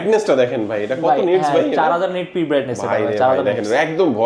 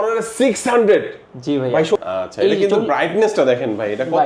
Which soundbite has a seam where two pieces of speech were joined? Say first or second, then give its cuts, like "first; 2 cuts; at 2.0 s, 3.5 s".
second; 1 cut; at 2.0 s